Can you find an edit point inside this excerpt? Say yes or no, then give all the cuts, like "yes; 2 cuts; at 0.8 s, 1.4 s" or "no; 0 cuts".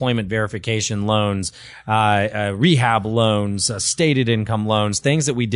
no; 0 cuts